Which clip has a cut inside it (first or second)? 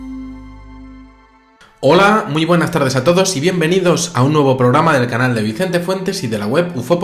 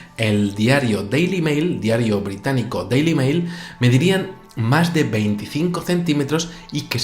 second